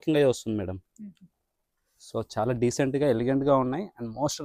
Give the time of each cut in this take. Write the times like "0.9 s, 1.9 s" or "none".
none